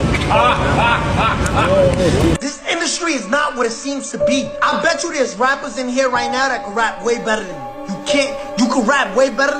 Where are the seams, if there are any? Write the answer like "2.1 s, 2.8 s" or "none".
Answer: none